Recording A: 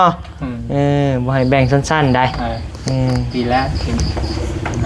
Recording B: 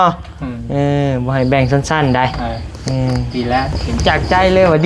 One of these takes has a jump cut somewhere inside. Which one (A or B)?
B